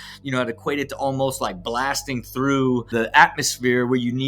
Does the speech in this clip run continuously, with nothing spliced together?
no; 1 cut; at 2.9 s

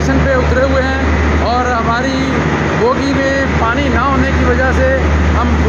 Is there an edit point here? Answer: no; 0 cuts

